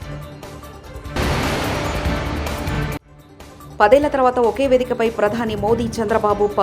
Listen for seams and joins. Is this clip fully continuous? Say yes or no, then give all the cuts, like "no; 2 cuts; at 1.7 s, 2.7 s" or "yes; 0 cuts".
no; 1 cut; at 1.1 s